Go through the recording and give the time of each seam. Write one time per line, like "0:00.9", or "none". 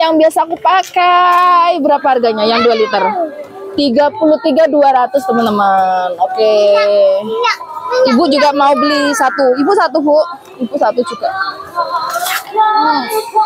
none